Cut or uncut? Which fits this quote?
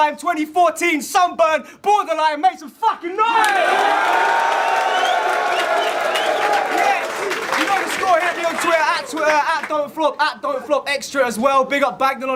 uncut